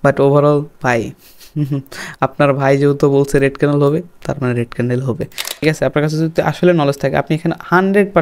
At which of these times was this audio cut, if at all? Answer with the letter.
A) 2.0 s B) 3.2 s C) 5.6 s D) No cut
C